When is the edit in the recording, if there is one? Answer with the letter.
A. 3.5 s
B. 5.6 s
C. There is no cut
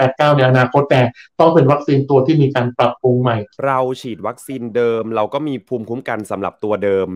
A